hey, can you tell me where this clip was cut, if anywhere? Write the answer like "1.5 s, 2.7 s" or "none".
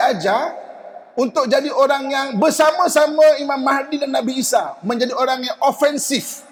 none